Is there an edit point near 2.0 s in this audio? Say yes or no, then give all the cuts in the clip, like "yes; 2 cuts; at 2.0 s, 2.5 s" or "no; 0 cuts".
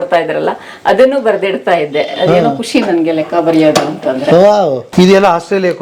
no; 1 cut; at 4.9 s